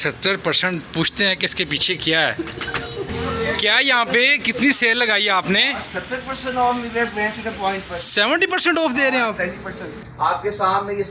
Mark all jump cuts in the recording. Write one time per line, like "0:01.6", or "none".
0:03.1
0:10.0